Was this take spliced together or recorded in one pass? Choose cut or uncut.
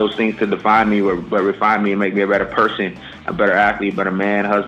uncut